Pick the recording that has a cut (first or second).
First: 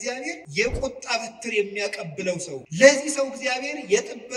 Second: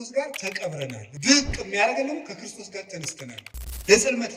second